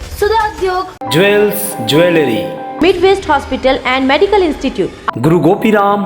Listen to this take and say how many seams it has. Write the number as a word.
zero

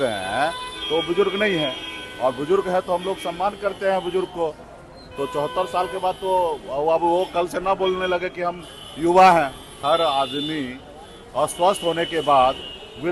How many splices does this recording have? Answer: one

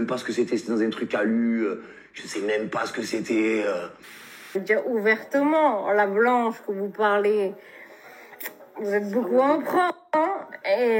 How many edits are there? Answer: one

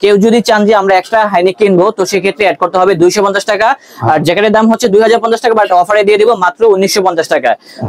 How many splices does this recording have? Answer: zero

